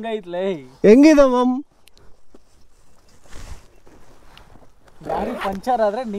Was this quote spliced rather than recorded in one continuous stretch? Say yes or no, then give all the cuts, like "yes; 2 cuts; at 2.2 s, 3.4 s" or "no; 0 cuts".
no; 0 cuts